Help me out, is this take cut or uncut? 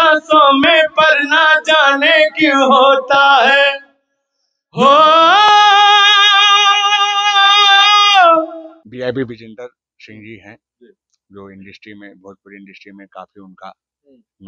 cut